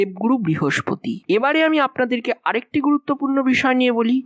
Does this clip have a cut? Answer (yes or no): yes